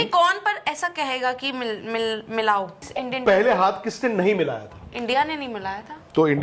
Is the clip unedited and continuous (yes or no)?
no